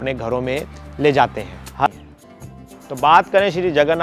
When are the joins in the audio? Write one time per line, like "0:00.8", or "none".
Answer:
0:01.9